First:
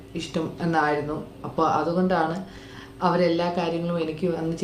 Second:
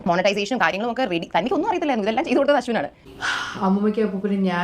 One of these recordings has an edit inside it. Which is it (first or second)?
second